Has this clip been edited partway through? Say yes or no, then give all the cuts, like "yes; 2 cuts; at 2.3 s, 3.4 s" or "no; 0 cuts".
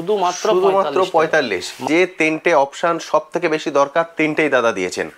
yes; 1 cut; at 1.8 s